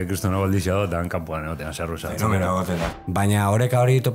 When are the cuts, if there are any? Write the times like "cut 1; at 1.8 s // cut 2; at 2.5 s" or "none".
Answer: cut 1; at 2.9 s